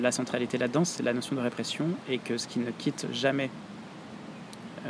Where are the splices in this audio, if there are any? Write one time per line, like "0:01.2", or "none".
none